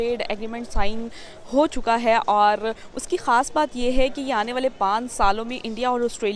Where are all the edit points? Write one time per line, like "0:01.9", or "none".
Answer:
none